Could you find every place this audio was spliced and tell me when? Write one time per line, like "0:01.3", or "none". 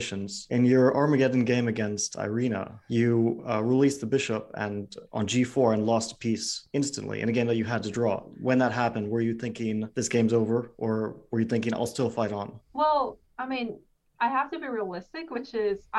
0:02.8
0:08.3